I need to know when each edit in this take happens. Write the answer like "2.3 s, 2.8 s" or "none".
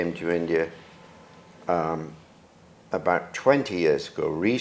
none